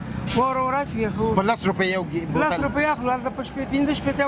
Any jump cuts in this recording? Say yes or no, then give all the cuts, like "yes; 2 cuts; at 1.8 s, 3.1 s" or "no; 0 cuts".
no; 0 cuts